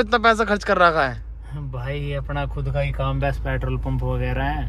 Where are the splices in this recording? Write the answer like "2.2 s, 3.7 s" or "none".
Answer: none